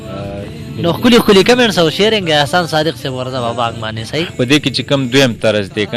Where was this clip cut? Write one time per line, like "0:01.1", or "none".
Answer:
0:04.3